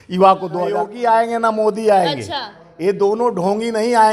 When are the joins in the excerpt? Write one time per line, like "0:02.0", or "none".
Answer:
0:00.9

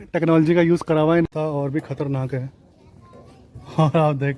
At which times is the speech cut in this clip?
0:01.2

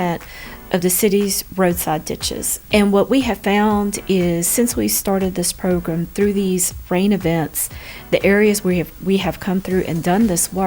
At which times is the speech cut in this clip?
0:02.5

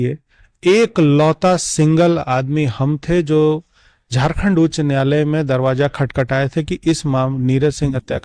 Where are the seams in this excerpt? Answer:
none

